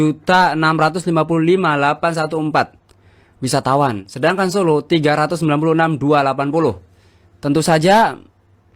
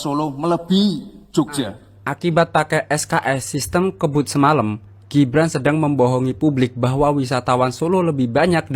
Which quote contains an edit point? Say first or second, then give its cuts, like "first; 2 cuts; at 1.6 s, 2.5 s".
second; 1 cut; at 1.5 s